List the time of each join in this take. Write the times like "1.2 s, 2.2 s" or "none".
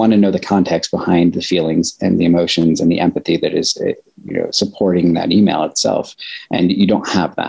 none